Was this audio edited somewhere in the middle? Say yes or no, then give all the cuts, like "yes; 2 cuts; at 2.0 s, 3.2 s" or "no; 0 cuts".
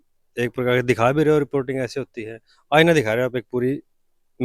no; 0 cuts